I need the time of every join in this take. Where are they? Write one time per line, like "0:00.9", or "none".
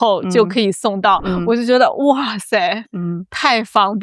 none